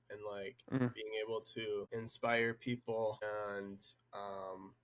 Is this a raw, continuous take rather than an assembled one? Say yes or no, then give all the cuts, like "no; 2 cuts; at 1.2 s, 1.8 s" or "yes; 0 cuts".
no; 2 cuts; at 1.9 s, 3.2 s